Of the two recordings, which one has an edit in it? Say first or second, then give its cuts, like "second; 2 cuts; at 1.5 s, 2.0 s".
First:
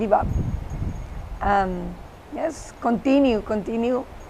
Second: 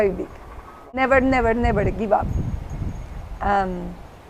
second; 1 cut; at 1.0 s